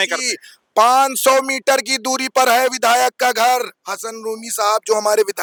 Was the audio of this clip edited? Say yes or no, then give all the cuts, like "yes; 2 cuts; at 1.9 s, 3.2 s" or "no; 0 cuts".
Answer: no; 0 cuts